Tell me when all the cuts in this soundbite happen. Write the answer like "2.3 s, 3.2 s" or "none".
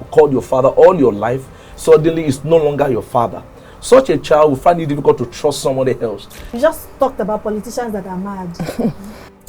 6.5 s